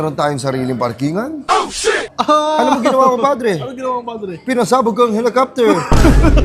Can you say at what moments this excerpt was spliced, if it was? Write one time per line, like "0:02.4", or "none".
none